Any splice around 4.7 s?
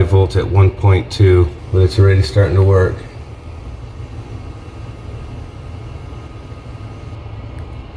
no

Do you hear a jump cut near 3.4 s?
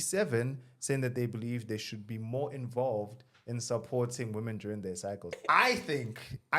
no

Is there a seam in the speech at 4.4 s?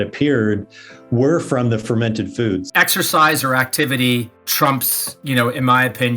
yes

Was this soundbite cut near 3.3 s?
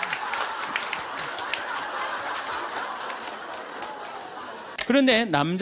no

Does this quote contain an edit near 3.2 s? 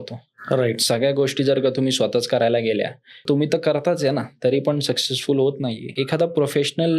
yes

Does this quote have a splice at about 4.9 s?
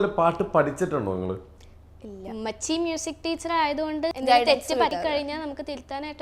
yes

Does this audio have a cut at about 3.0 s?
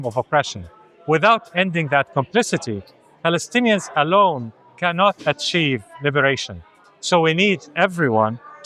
no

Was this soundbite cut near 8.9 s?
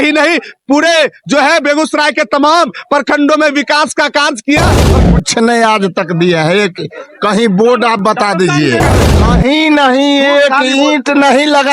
yes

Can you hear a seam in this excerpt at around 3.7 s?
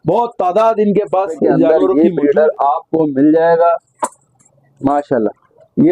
no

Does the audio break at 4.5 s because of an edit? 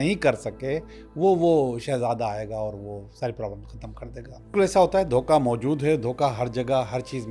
yes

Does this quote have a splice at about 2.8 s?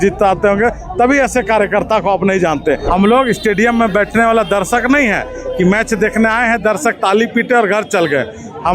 yes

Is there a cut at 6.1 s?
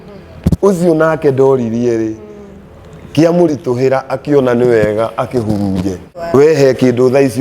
yes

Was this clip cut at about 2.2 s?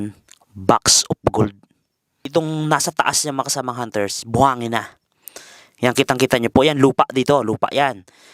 yes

